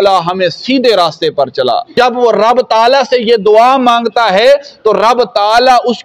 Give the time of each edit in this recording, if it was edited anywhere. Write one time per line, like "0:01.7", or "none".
0:01.9